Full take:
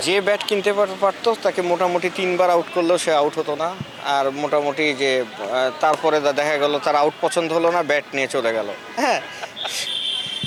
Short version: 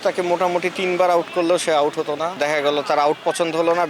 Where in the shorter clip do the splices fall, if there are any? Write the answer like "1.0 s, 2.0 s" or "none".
2.4 s